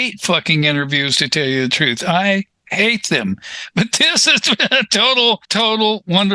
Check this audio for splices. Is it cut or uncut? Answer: uncut